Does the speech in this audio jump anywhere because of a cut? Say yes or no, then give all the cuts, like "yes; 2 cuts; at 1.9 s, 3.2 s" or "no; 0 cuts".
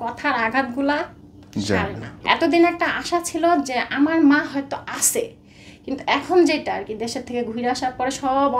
yes; 1 cut; at 2.1 s